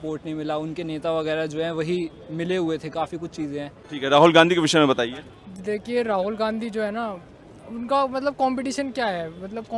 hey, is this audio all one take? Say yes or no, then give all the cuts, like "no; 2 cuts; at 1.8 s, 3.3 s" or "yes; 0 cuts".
no; 1 cut; at 3.8 s